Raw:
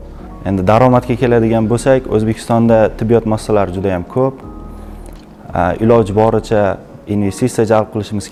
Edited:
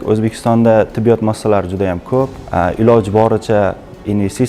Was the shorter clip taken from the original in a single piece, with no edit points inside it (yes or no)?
no